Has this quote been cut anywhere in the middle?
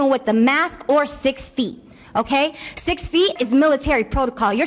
yes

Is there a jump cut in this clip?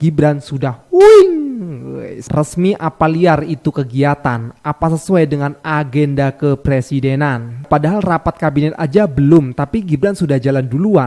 yes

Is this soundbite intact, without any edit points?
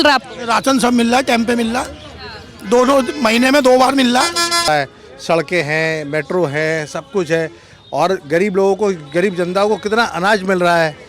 no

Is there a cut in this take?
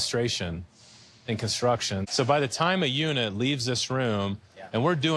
yes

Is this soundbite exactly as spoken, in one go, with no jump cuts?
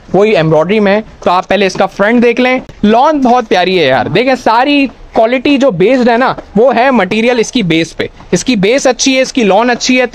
yes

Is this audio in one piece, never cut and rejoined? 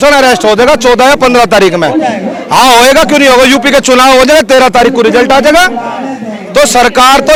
yes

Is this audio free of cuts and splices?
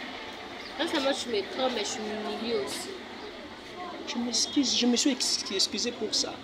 yes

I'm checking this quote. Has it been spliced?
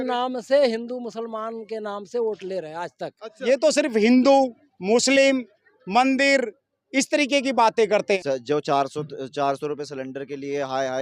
yes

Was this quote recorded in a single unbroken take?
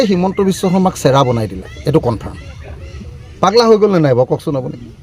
yes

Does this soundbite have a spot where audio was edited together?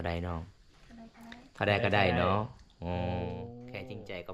no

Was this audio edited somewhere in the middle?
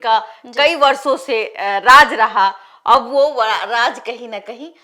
no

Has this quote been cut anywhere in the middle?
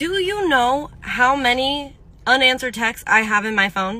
no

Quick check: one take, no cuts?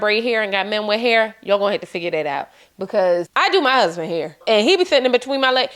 no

